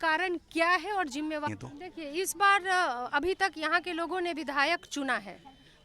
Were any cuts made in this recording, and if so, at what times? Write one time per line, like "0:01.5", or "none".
0:01.5